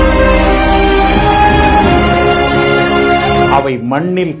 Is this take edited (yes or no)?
yes